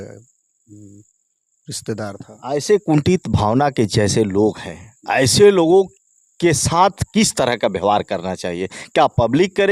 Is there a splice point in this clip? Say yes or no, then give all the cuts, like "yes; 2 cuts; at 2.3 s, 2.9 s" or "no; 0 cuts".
no; 0 cuts